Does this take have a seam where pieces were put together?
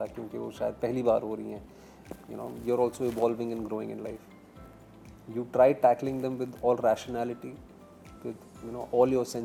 no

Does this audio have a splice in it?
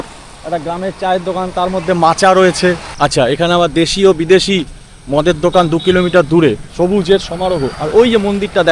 yes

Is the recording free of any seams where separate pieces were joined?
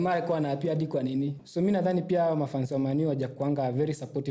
no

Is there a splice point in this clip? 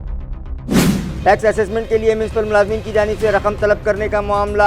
yes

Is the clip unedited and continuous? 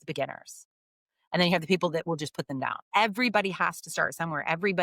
no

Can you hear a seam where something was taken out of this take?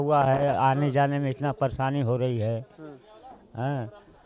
no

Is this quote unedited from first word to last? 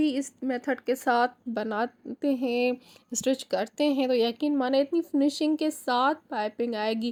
yes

